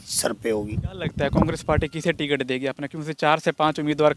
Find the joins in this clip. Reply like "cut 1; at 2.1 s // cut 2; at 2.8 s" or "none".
cut 1; at 1.0 s